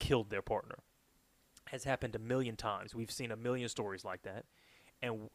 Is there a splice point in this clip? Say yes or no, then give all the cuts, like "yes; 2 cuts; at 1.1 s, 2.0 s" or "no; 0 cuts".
no; 0 cuts